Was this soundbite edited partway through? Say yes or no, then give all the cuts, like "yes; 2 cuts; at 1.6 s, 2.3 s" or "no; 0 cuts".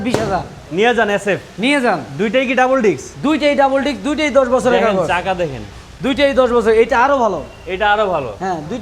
no; 0 cuts